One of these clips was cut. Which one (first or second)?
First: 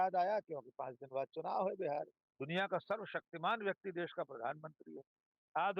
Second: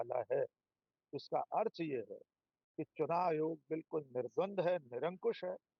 first